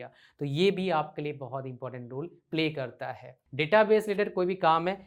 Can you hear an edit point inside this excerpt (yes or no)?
yes